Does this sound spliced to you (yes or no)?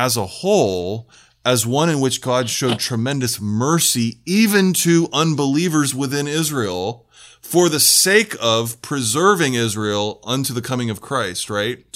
no